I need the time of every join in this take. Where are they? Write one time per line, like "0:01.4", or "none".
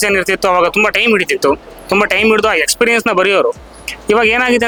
none